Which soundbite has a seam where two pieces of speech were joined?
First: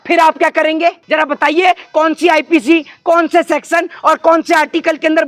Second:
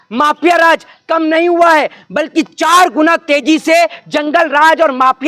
first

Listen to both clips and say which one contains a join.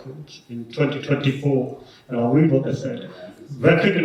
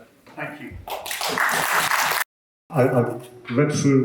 second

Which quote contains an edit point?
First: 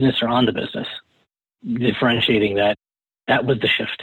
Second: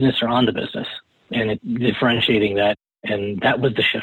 first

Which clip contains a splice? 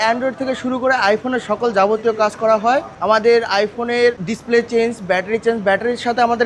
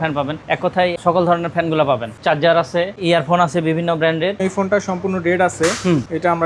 second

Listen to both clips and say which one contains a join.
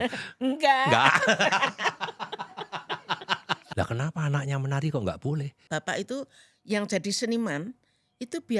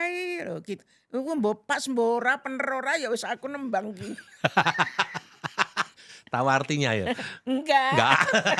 first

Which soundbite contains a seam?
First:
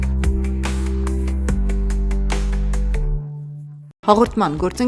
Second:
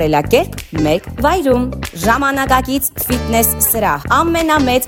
first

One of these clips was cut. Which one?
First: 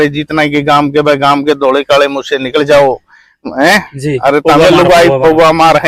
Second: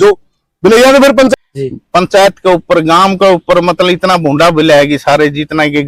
second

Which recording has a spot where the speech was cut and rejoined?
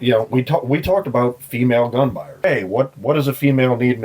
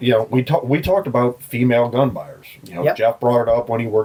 first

